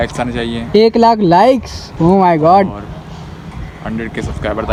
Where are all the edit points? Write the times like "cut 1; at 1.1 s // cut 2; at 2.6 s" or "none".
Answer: none